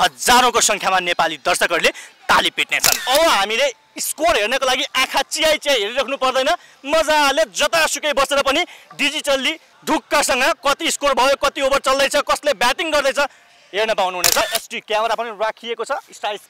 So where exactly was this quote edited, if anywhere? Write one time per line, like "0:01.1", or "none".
0:03.0
0:14.4